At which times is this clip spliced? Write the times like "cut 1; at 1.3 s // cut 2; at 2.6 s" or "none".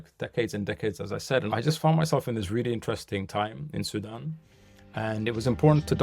cut 1; at 1.5 s